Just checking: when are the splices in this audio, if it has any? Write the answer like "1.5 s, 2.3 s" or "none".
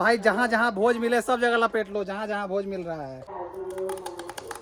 3.3 s